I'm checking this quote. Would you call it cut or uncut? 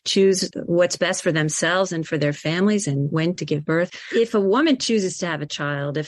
cut